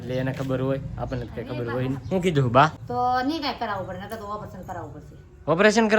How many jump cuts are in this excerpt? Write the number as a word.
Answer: one